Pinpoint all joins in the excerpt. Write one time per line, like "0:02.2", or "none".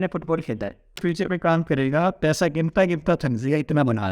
0:01.0